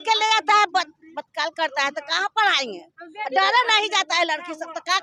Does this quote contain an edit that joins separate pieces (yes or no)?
no